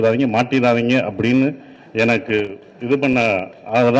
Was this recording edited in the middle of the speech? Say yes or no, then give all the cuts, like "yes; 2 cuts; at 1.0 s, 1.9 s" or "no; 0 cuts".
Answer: no; 0 cuts